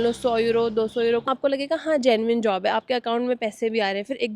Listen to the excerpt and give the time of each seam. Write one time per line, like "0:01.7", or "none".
0:01.3